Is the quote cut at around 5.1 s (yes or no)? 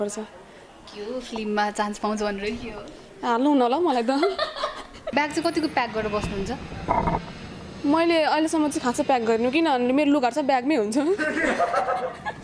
yes